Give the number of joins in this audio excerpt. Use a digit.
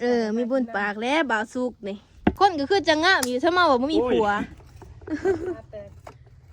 1